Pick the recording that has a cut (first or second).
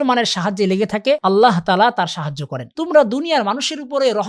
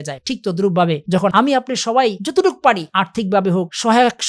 first